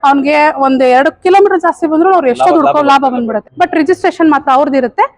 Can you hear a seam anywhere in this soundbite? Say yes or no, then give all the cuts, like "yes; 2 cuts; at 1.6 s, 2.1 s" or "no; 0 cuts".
yes; 1 cut; at 3.4 s